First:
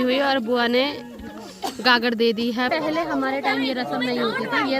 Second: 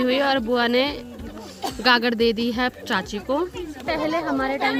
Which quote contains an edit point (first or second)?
first